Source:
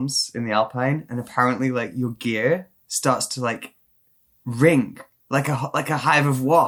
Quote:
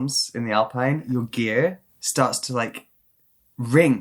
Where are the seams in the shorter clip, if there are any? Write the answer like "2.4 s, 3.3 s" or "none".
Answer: 1.0 s